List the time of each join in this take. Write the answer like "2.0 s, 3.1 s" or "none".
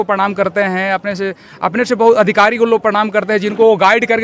none